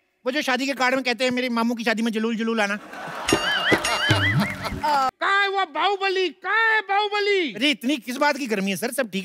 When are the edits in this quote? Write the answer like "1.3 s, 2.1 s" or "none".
5.1 s